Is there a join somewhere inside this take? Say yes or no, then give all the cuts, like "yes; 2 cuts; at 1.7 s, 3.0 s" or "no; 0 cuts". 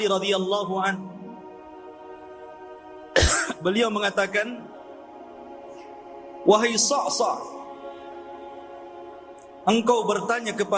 no; 0 cuts